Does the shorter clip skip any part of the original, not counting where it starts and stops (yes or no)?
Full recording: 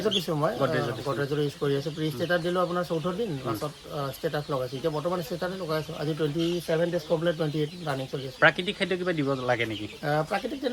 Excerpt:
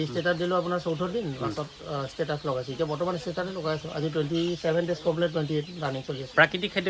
no